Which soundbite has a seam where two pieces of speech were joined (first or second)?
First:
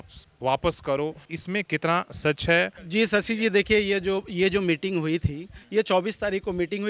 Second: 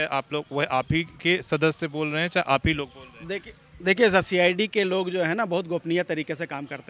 first